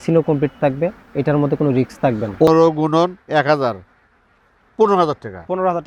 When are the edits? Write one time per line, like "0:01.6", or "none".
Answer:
0:02.5